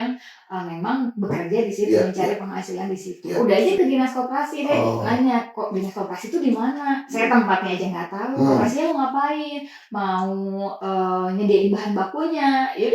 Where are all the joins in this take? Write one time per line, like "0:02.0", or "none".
0:03.2
0:08.8